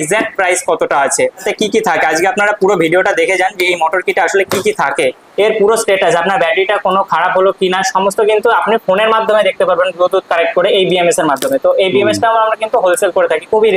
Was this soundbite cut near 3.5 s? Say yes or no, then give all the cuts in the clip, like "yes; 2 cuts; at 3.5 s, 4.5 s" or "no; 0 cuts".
no; 2 cuts; at 1.4 s, 5.2 s